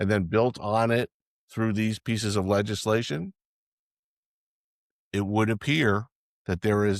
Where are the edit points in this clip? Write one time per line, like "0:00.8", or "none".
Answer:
none